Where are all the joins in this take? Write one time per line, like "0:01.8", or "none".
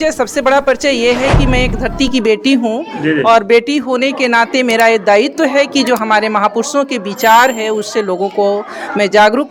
none